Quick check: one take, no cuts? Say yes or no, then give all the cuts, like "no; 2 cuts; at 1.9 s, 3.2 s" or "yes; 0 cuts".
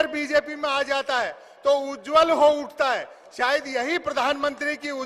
yes; 0 cuts